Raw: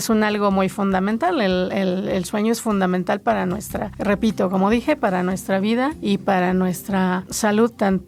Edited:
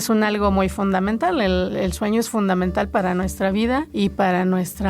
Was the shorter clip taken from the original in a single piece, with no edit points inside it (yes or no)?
no